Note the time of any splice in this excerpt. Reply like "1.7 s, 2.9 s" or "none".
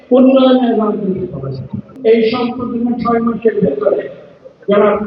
1.9 s